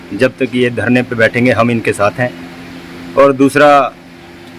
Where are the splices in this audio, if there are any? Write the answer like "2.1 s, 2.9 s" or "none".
none